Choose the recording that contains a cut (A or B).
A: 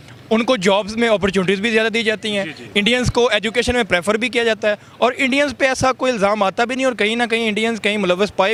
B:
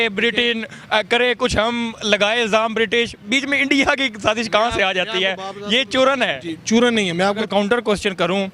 B